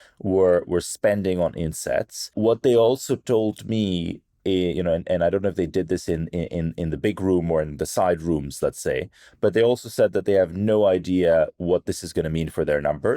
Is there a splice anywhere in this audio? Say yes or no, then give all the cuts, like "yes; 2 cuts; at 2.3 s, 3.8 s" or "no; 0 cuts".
yes; 1 cut; at 2.3 s